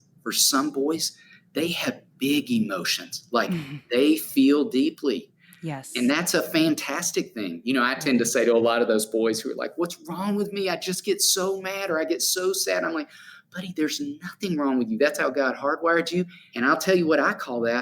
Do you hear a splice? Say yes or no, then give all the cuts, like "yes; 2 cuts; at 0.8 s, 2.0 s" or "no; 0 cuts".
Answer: yes; 1 cut; at 16.4 s